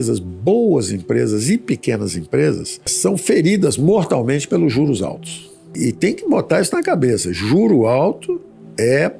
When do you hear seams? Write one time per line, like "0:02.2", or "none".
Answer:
none